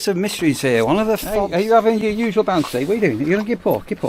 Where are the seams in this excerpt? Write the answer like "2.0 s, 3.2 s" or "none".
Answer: 1.3 s